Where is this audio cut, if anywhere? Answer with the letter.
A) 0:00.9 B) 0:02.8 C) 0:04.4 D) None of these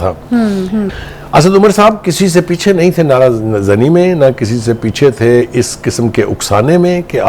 A